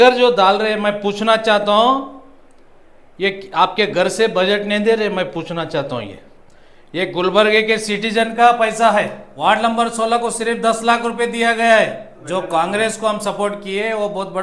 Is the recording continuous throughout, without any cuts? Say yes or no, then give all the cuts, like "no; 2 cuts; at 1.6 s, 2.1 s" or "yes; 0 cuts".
no; 2 cuts; at 9.2 s, 12.1 s